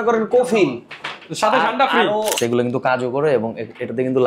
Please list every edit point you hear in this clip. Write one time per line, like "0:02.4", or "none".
0:02.4